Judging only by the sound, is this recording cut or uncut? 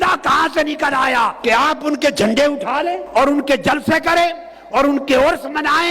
cut